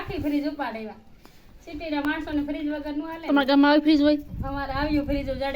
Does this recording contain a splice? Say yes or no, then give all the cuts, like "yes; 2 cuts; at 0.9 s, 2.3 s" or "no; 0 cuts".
no; 0 cuts